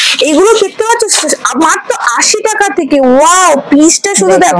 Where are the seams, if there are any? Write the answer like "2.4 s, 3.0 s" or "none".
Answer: none